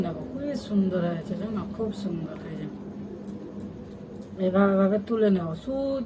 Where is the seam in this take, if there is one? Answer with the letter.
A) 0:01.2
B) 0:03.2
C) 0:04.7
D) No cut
D